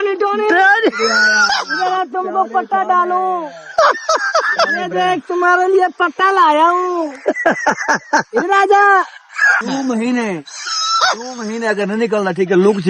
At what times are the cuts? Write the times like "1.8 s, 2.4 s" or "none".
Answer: 9.5 s